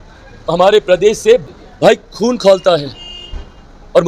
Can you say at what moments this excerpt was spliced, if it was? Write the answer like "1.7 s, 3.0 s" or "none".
1.4 s